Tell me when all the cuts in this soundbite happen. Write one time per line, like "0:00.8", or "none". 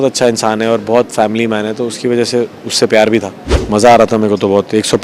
0:03.5